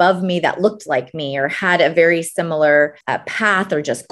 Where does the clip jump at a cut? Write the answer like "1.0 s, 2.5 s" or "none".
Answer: 3.0 s